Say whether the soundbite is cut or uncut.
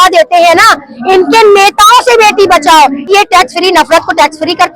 cut